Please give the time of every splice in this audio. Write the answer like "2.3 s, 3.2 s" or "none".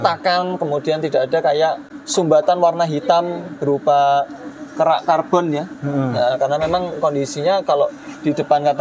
none